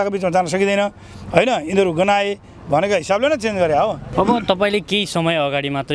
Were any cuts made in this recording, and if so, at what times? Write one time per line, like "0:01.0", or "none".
0:04.0